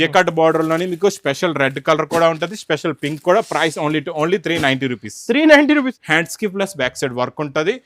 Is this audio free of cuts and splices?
no; 1 cut; at 5.9 s

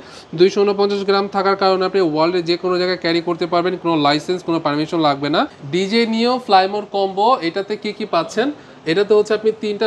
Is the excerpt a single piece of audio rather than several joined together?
no; 1 cut; at 5.6 s

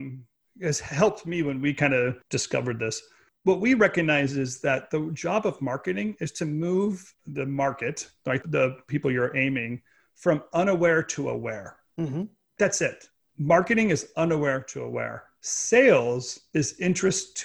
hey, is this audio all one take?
no; 1 cut; at 7.2 s

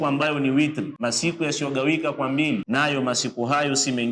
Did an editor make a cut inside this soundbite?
yes; 2 cuts; at 0.9 s, 2.6 s

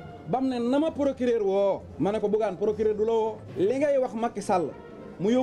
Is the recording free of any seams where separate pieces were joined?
yes; 0 cuts

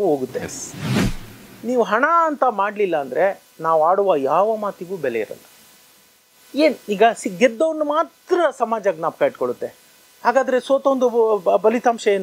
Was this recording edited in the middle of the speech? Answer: yes; 1 cut; at 1.0 s

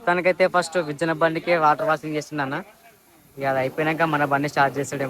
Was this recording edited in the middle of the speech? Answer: no; 0 cuts

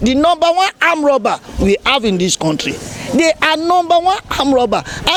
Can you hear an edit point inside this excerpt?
no; 0 cuts

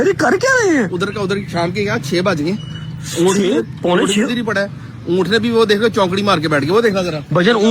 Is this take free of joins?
yes; 0 cuts

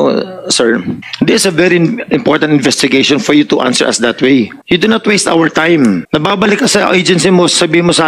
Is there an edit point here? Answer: yes; 3 cuts; at 1.0 s, 4.6 s, 6.0 s

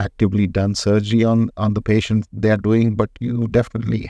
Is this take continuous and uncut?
yes; 0 cuts

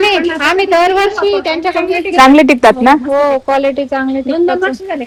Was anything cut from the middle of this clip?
no; 0 cuts

